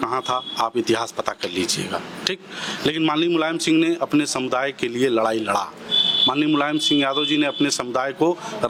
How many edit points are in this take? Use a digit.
0